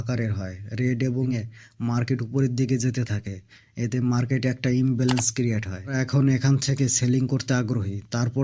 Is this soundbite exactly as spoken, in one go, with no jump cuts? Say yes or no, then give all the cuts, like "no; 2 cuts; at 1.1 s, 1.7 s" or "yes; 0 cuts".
no; 2 cuts; at 1.3 s, 6.0 s